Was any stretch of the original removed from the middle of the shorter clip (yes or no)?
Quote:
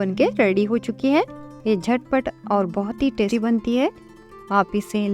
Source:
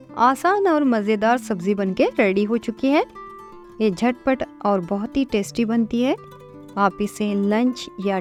yes